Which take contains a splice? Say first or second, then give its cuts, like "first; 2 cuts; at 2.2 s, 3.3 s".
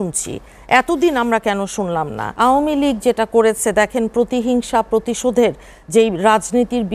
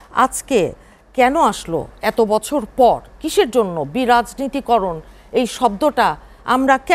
first; 1 cut; at 2.2 s